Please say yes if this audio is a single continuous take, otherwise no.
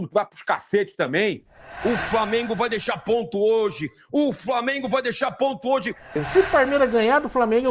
no